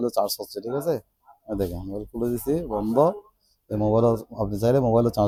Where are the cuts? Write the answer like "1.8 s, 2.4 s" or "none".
none